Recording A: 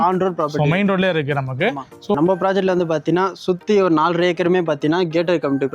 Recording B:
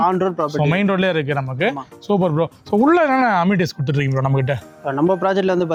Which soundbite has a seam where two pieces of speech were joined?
A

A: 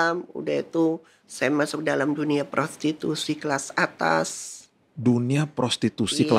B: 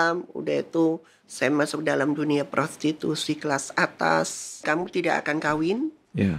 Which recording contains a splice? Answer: B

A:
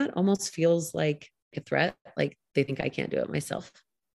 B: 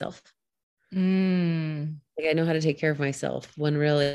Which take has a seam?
A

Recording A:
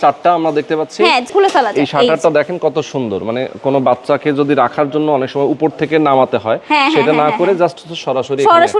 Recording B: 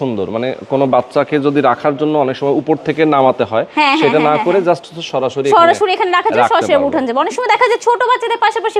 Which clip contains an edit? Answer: A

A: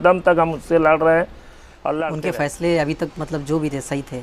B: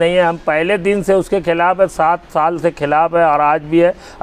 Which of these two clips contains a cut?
A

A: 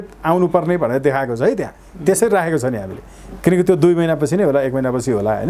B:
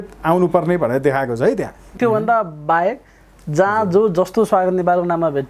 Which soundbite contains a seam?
B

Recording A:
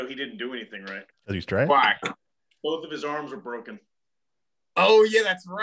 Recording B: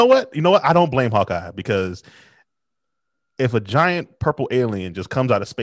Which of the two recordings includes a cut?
A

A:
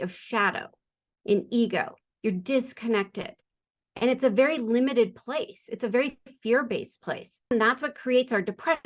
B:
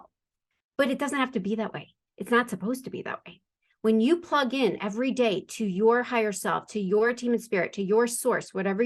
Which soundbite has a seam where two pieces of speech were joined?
A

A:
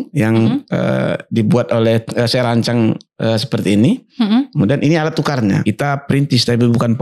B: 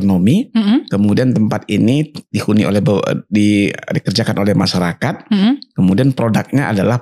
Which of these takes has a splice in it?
A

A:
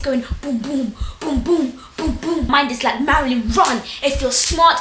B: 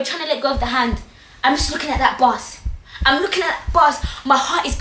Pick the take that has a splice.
A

